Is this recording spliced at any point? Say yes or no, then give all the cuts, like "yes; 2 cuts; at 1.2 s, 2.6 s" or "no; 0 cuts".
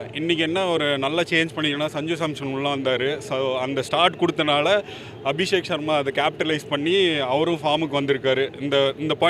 no; 0 cuts